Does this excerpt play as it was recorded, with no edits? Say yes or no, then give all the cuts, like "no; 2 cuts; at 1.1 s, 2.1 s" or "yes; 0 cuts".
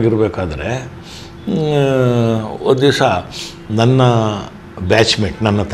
yes; 0 cuts